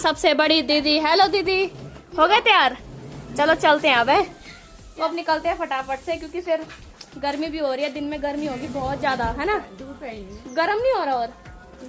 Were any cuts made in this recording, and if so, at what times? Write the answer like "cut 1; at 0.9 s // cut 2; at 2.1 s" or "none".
none